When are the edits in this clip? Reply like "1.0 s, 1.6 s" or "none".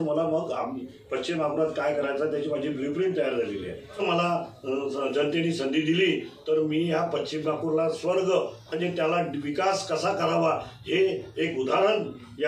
4.0 s